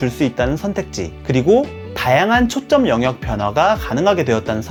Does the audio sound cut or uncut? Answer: uncut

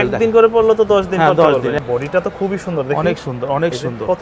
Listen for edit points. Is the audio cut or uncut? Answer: cut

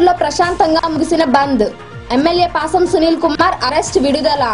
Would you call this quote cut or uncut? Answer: uncut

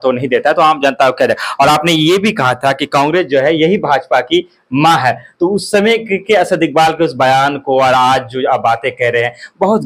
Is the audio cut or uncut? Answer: uncut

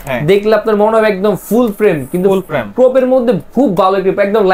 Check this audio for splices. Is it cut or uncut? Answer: uncut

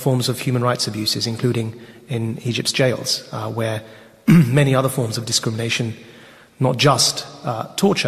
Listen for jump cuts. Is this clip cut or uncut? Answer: cut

